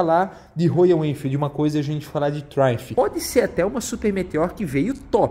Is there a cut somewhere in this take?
yes; 1 cut; at 2.8 s

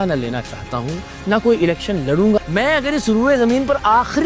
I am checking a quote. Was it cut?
yes; 1 cut; at 2.4 s

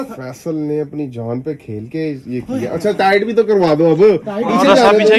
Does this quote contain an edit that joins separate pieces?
no; 0 cuts

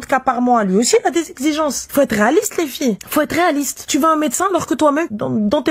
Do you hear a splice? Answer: yes; 1 cut; at 1.8 s

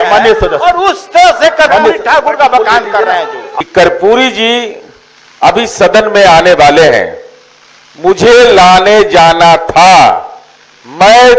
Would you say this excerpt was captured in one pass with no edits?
no; 1 cut; at 3.5 s

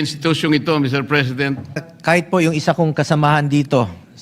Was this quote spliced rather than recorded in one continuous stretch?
yes; 1 cut; at 1.9 s

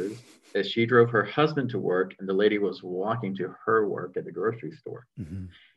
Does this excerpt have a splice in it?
no; 0 cuts

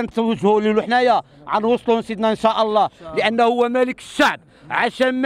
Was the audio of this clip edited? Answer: no; 0 cuts

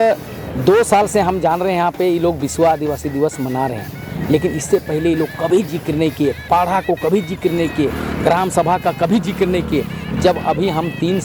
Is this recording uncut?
yes; 0 cuts

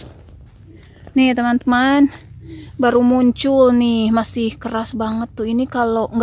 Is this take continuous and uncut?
yes; 0 cuts

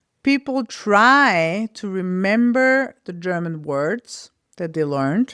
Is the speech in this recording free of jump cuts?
yes; 0 cuts

